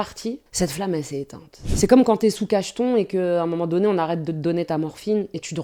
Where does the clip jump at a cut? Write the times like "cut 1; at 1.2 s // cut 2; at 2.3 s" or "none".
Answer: none